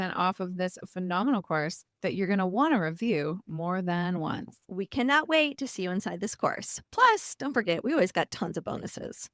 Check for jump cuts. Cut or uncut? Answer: cut